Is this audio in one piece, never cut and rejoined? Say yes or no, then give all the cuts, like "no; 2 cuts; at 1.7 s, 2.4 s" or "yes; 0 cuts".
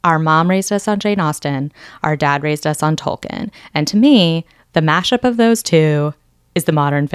yes; 0 cuts